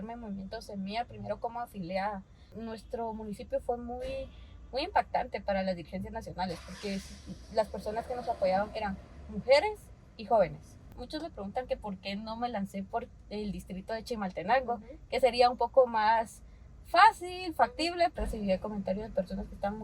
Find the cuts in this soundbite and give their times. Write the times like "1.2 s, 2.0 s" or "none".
2.6 s, 10.9 s, 18.1 s